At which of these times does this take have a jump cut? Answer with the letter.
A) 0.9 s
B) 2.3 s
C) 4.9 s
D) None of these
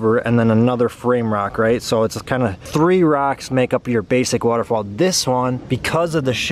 D